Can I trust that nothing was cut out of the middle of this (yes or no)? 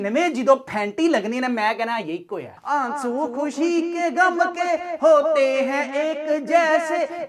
no